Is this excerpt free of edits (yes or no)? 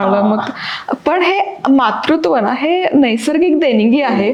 yes